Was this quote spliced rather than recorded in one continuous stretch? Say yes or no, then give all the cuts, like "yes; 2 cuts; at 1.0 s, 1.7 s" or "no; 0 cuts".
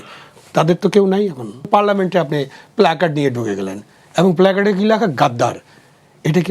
yes; 1 cut; at 1.7 s